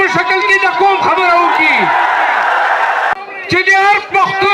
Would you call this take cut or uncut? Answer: cut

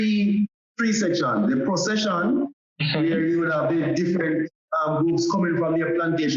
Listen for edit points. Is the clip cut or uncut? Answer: uncut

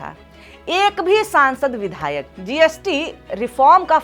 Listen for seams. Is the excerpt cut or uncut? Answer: uncut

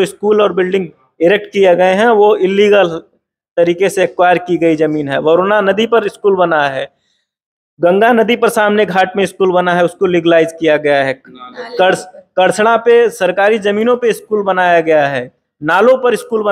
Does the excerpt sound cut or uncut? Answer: uncut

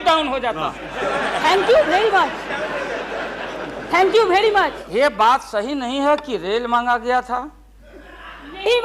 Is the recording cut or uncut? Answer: cut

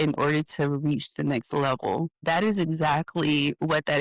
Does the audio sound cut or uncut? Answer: cut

